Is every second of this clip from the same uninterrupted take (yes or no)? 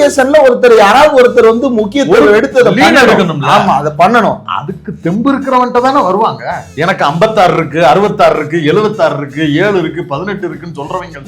no